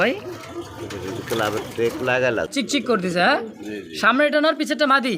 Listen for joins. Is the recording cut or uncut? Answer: cut